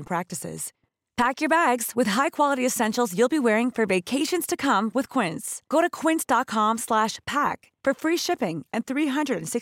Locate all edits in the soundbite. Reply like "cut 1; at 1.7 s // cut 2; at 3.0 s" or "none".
none